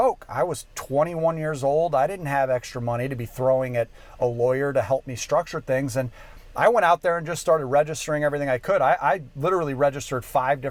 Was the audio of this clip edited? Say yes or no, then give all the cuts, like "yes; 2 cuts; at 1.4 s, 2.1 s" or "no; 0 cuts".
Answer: no; 0 cuts